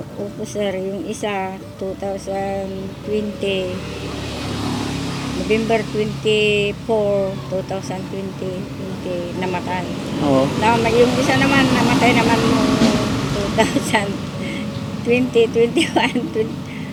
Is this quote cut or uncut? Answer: uncut